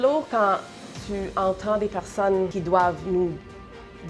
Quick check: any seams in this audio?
yes; 1 cut; at 2.6 s

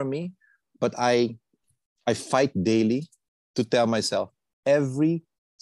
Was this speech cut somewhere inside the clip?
no; 0 cuts

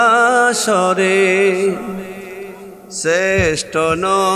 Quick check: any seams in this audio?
no; 0 cuts

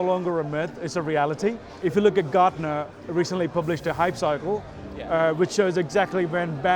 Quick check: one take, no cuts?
no; 1 cut; at 1.8 s

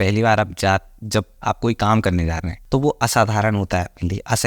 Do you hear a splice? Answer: yes; 1 cut; at 2.5 s

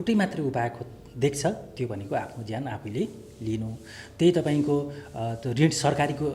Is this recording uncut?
yes; 0 cuts

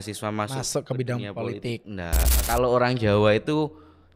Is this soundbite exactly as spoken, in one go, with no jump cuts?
no; 1 cut; at 2.4 s

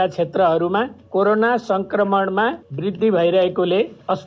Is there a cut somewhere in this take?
yes; 1 cut; at 2.7 s

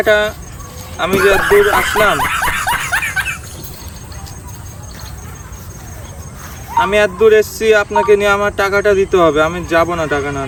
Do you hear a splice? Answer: no; 0 cuts

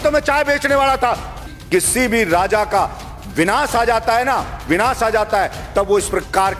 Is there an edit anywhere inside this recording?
yes; 1 cut; at 1.5 s

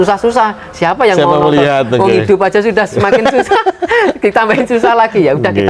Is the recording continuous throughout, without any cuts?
yes; 0 cuts

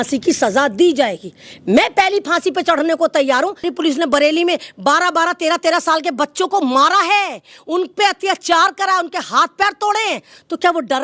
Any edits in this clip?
yes; 1 cut; at 3.7 s

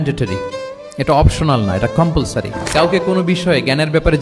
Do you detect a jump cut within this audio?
yes; 2 cuts; at 0.9 s, 2.6 s

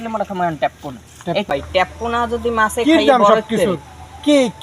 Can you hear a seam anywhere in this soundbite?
yes; 1 cut; at 1.5 s

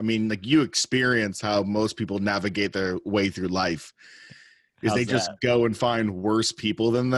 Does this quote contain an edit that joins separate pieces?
no; 0 cuts

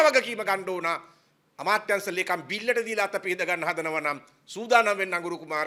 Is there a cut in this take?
no; 0 cuts

